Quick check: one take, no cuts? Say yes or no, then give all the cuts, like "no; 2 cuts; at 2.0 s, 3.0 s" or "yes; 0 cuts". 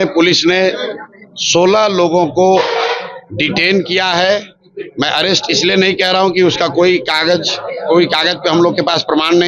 yes; 0 cuts